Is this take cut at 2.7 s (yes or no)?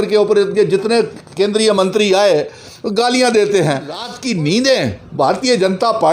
no